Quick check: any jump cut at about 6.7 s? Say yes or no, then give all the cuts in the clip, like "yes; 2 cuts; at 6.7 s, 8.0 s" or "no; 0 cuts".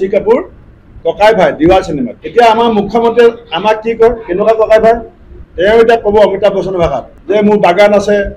no; 1 cut; at 2.1 s